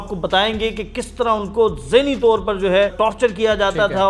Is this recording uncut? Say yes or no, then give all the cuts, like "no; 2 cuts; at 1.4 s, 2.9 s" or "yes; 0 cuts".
no; 1 cut; at 2.9 s